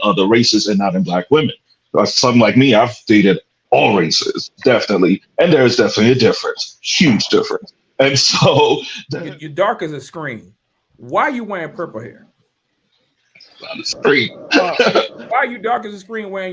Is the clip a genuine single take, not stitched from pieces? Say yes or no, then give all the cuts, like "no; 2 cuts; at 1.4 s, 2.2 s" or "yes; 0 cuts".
no; 2 cuts; at 8.9 s, 15.2 s